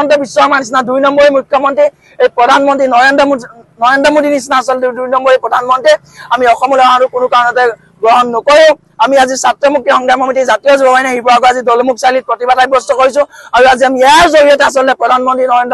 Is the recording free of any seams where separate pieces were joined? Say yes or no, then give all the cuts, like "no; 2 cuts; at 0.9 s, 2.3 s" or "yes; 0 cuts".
yes; 0 cuts